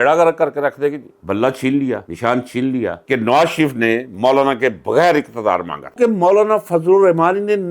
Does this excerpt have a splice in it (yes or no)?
yes